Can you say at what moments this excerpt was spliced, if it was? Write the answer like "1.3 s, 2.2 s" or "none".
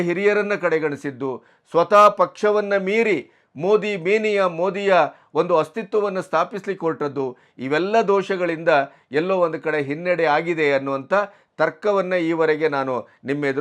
none